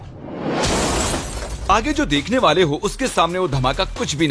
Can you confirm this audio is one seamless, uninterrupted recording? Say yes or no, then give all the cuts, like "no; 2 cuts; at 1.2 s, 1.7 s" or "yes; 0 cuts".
no; 1 cut; at 1.7 s